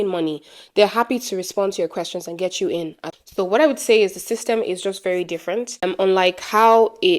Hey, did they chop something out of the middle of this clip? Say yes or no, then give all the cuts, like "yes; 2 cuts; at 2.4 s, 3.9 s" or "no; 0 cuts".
yes; 2 cuts; at 3.0 s, 5.8 s